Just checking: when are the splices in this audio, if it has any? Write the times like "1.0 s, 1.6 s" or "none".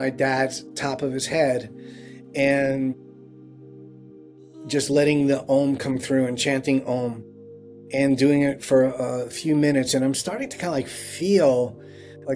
none